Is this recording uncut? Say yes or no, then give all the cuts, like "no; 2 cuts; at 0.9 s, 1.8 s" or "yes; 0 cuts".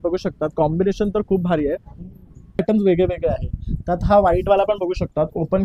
no; 1 cut; at 2.6 s